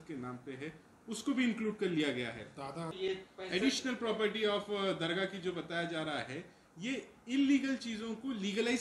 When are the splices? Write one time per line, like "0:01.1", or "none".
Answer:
0:02.9